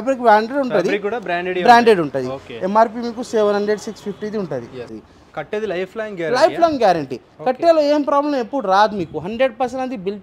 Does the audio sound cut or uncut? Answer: cut